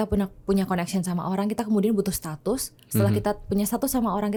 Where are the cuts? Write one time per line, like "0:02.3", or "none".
none